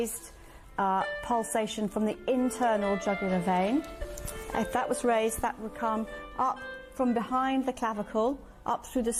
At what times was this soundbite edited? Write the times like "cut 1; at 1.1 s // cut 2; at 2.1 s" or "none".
none

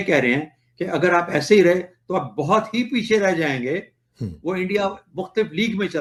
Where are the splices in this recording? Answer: none

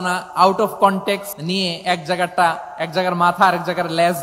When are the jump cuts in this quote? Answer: cut 1; at 1.3 s

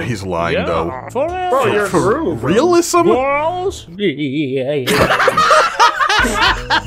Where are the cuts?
cut 1; at 1.0 s

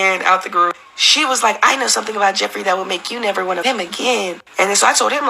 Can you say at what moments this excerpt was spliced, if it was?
cut 1; at 3.6 s

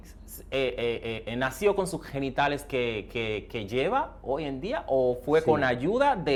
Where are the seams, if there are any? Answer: none

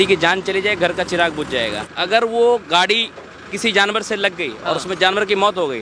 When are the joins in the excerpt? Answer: cut 1; at 1.9 s

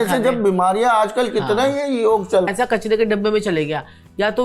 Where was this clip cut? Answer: cut 1; at 2.5 s

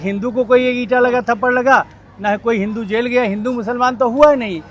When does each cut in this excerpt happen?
none

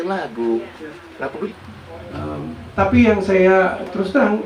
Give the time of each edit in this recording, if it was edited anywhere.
cut 1; at 1.5 s

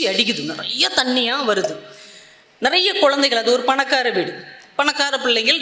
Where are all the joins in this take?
none

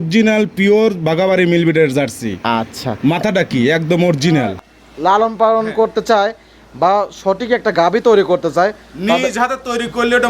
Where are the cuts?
cut 1; at 4.7 s

